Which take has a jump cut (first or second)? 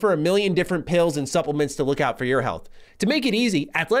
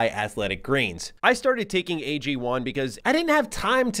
second